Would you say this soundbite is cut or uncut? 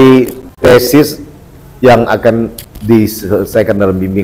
cut